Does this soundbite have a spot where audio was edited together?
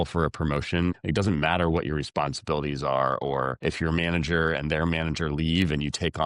yes; 2 cuts; at 1.0 s, 3.5 s

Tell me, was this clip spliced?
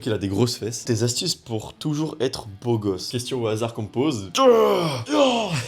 yes; 2 cuts; at 0.8 s, 4.3 s

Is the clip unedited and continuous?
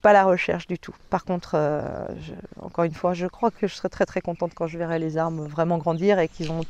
yes; 0 cuts

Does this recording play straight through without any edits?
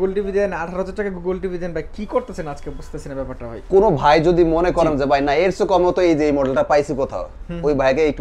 yes; 0 cuts

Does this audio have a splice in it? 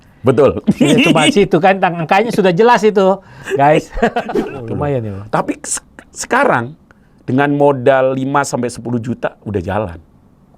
yes; 1 cut; at 4.2 s

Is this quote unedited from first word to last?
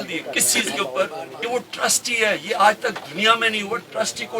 no; 1 cut; at 1.3 s

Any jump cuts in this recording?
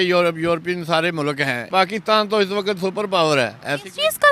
yes; 1 cut; at 1.7 s

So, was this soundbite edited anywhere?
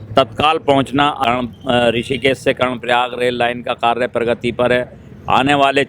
yes; 1 cut; at 1.2 s

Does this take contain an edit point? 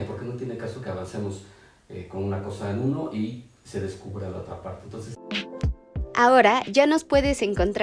yes; 1 cut; at 5.1 s

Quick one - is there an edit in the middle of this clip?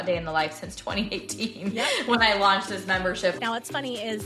yes; 1 cut; at 3.3 s

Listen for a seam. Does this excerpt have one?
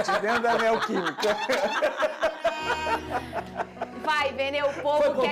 no; 0 cuts

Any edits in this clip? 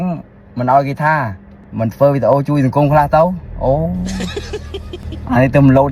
no; 0 cuts

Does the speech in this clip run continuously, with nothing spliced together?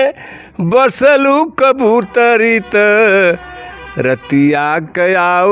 yes; 0 cuts

